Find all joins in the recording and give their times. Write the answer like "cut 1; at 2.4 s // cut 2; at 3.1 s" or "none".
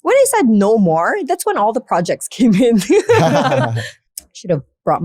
cut 1; at 3.9 s